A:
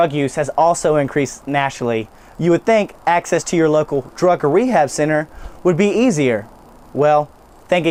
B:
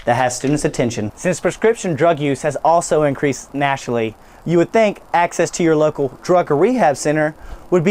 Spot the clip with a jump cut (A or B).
B